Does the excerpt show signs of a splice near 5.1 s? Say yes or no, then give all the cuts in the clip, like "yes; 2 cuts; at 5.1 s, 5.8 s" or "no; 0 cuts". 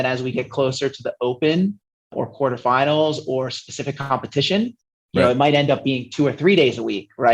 no; 0 cuts